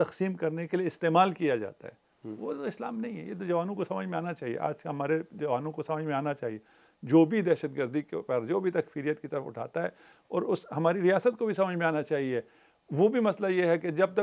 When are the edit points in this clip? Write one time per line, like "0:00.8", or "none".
none